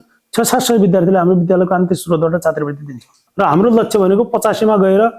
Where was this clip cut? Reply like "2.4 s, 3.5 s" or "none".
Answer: 3.2 s

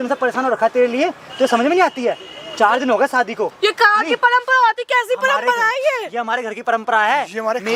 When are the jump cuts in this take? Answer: none

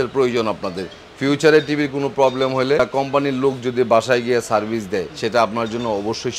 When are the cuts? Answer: 2.8 s, 5.1 s

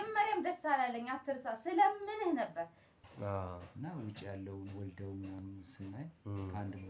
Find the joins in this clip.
2.9 s

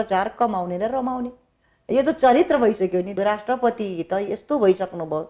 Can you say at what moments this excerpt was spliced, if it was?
3.1 s

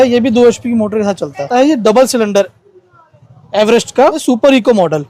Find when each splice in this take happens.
1.5 s, 4.2 s

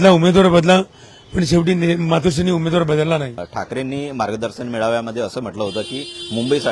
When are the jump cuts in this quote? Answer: 3.4 s

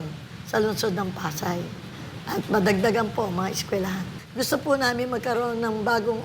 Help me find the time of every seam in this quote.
4.2 s

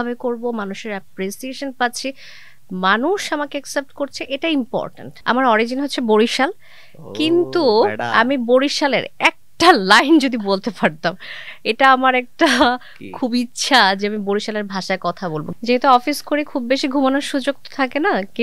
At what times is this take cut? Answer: 5.1 s, 15.5 s

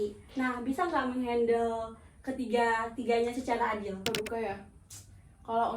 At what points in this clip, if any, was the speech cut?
4.0 s

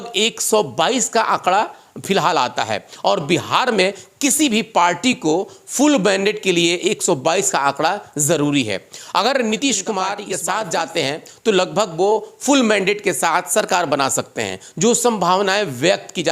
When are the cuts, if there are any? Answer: 10.3 s

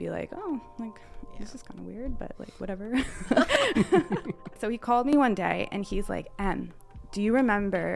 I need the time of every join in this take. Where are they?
4.6 s

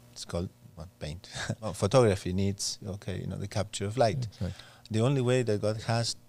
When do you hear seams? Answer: 1.7 s

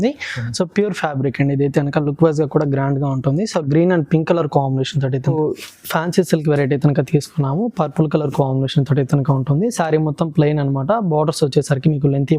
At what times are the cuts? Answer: 5.3 s

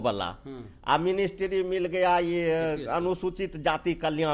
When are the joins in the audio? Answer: none

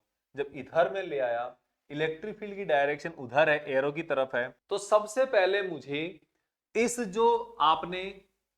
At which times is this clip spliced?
4.6 s

